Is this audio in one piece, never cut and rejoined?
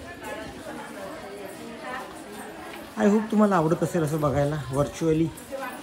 yes; 0 cuts

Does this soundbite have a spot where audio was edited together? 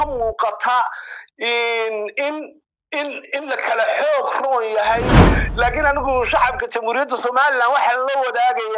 yes; 1 cut; at 5.2 s

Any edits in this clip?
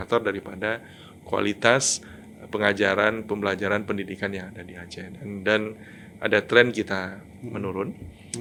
no; 0 cuts

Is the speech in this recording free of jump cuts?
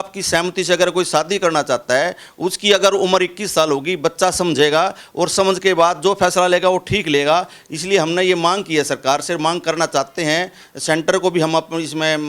yes; 0 cuts

